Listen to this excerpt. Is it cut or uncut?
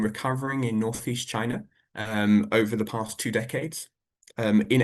uncut